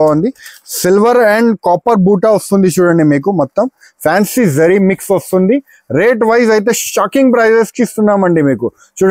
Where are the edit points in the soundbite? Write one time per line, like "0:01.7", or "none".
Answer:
none